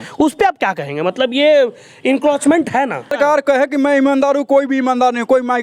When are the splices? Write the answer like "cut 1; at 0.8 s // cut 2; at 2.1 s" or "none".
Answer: cut 1; at 3.1 s